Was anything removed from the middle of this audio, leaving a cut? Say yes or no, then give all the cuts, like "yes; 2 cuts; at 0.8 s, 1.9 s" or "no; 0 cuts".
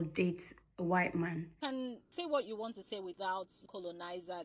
yes; 1 cut; at 1.6 s